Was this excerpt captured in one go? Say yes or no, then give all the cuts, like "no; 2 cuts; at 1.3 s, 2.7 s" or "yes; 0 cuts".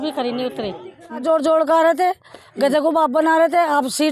no; 1 cut; at 1.2 s